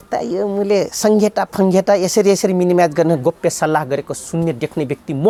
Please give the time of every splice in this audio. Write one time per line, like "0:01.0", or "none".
none